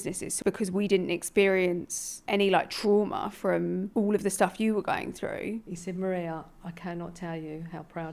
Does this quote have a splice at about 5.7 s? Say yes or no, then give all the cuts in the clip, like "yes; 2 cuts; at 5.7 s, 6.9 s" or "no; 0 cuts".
yes; 1 cut; at 5.7 s